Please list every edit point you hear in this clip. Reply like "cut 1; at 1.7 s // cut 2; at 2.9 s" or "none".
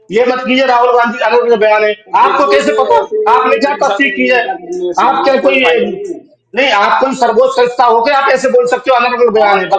none

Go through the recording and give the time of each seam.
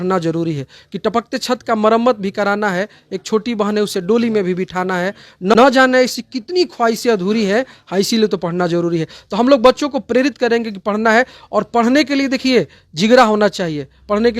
none

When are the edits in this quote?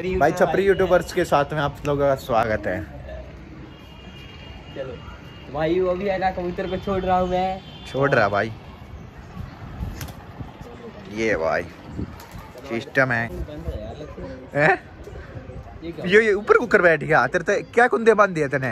cut 1; at 13.4 s

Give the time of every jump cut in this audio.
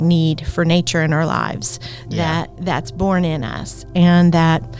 none

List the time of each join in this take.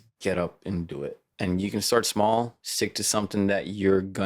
cut 1; at 1.2 s // cut 2; at 2.6 s

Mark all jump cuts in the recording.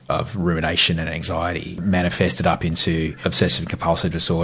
cut 1; at 1.8 s // cut 2; at 3.2 s

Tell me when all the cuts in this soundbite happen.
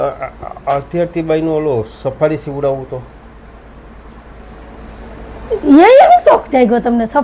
none

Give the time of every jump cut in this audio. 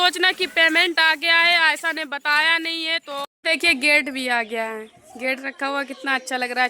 cut 1; at 3.0 s

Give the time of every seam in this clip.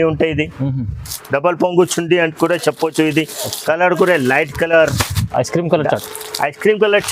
none

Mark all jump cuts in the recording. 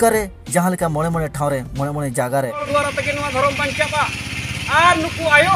cut 1; at 2.7 s

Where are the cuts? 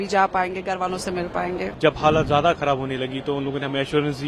cut 1; at 1.7 s

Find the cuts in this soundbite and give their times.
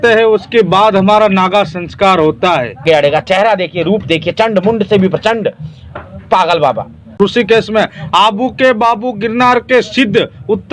cut 1; at 2.8 s // cut 2; at 7.2 s

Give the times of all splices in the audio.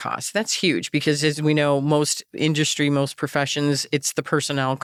none

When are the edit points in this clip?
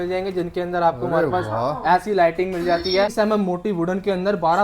cut 1; at 3.1 s

